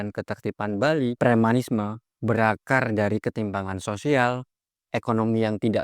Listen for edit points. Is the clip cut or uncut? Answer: cut